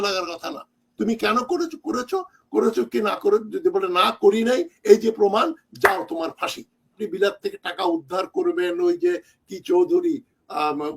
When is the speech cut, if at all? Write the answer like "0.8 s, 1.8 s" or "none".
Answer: 7.0 s